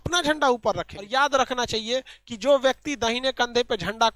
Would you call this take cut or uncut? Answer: cut